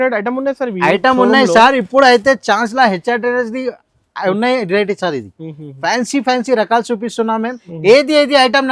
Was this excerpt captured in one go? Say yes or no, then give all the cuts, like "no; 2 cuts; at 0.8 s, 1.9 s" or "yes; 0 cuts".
no; 1 cut; at 7.6 s